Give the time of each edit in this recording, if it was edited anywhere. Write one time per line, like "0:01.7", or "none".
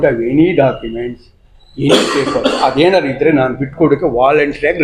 none